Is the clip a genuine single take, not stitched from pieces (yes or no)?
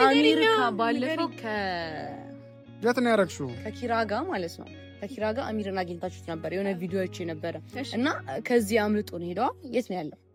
yes